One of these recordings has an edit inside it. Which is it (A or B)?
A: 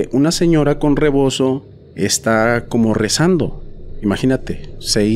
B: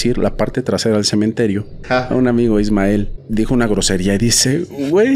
B